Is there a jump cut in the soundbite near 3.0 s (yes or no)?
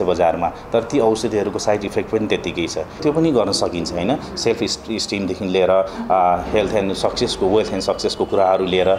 yes